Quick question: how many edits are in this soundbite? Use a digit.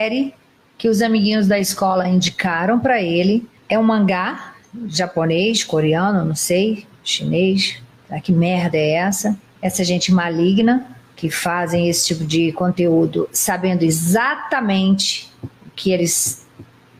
0